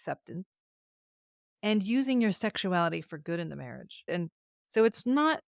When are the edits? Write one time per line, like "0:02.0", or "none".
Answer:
0:04.1